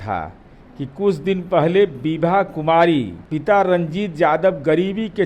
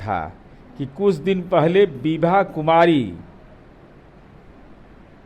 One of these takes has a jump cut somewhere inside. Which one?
first; 1 cut; at 3.2 s

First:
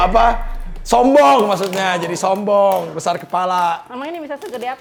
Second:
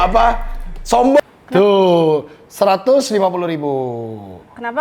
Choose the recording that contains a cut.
second; 1 cut; at 1.2 s

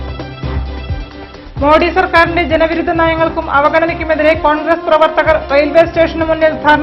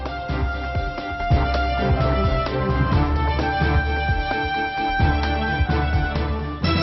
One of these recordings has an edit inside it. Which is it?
first; 1 cut; at 1.0 s

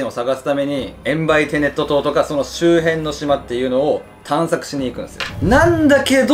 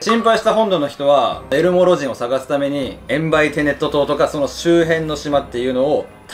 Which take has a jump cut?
first; 1 cut; at 5.2 s

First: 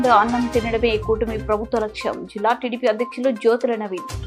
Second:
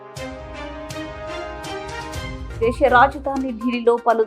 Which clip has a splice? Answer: second; 1 cut; at 2.4 s

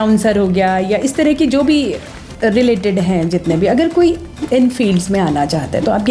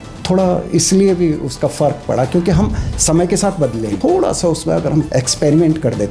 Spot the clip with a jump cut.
second; 2 cuts; at 3.9 s, 5.1 s

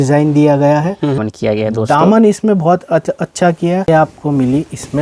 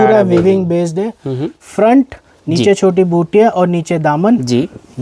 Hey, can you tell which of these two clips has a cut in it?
first; 2 cuts; at 1.1 s, 3.9 s

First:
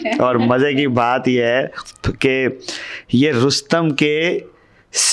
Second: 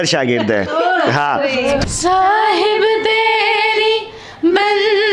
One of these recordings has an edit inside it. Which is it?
second; 1 cut; at 1.8 s

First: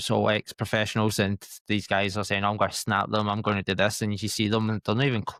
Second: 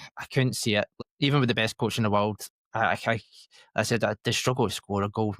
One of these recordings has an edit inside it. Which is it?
second; 1 cut; at 0.9 s

